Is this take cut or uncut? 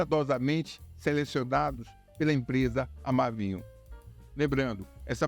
uncut